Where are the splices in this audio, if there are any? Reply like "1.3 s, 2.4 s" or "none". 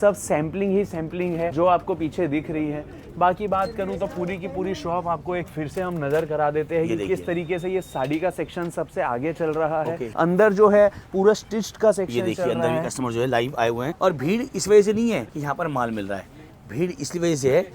1.5 s, 10.1 s, 13.9 s, 15.3 s